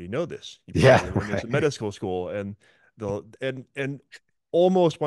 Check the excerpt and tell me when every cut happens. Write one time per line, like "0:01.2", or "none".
none